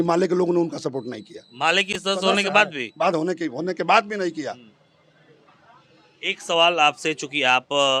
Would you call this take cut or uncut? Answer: uncut